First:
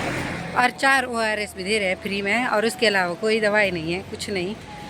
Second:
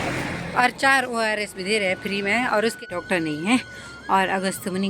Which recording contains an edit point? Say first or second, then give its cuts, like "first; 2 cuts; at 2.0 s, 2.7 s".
second; 1 cut; at 2.8 s